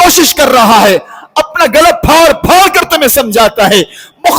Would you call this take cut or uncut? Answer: uncut